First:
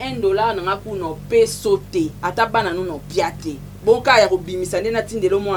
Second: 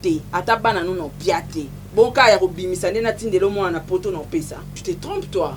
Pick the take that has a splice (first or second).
second